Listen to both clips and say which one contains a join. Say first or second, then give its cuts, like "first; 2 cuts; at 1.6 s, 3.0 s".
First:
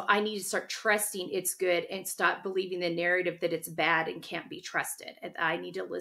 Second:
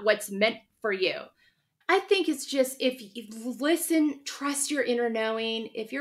second; 1 cut; at 1.8 s